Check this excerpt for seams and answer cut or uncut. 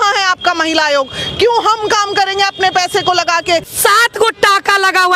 cut